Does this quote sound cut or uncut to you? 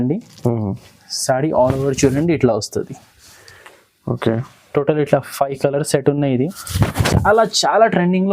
cut